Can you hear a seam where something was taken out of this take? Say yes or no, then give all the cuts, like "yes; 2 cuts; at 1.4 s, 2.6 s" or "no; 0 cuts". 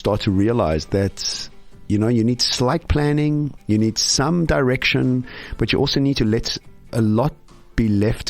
no; 0 cuts